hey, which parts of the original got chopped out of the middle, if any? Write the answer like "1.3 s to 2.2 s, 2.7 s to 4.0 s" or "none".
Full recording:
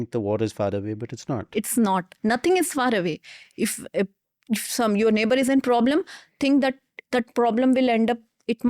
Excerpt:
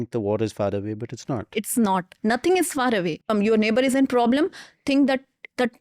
3.3 s to 4.8 s